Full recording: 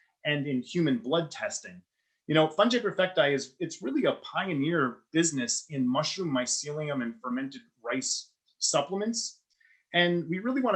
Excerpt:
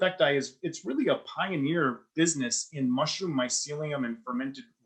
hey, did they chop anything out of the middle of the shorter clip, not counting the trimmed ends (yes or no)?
no